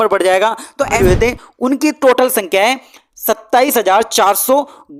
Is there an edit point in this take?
yes; 1 cut; at 0.9 s

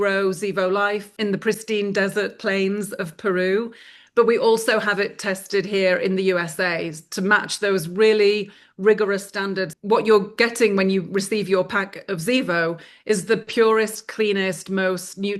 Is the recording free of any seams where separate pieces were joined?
no; 2 cuts; at 1.1 s, 9.7 s

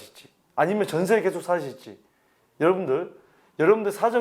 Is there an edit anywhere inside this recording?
no; 0 cuts

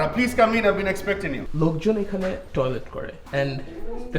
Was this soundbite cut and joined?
yes; 1 cut; at 1.4 s

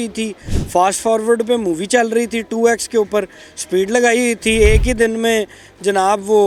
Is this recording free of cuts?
yes; 0 cuts

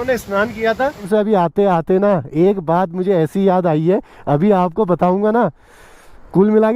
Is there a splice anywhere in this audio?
yes; 1 cut; at 1.1 s

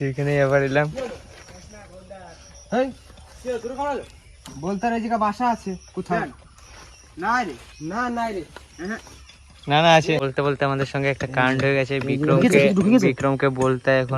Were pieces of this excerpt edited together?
yes; 1 cut; at 10.2 s

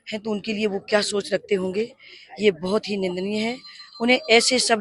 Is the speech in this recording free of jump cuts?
yes; 0 cuts

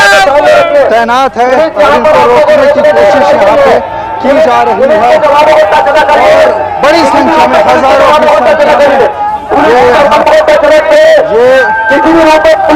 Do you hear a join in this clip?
no; 0 cuts

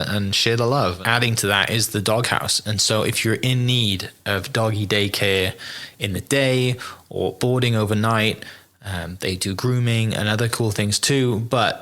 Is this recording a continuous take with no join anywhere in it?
no; 1 cut; at 1.0 s

